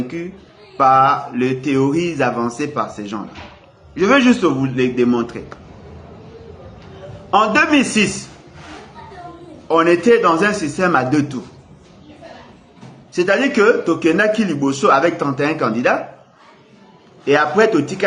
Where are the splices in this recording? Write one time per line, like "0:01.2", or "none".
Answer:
none